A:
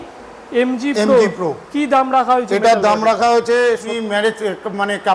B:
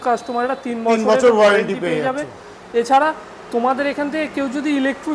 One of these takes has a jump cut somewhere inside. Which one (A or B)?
A